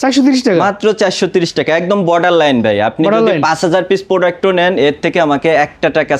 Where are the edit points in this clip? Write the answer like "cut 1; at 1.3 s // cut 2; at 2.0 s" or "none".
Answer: none